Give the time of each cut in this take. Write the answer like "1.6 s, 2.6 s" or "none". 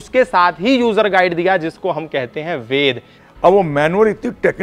3.1 s